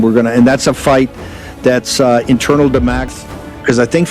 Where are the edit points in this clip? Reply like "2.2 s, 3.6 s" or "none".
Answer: 3.1 s